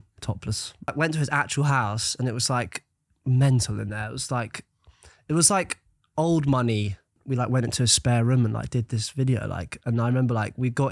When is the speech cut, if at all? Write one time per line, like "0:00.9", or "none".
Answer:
0:00.9
0:07.2